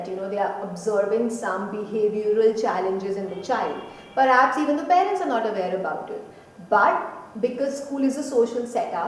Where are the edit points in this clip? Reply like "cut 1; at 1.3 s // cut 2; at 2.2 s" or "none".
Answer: none